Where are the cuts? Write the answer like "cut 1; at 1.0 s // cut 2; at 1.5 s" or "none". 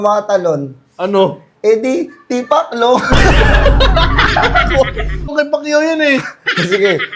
cut 1; at 5.3 s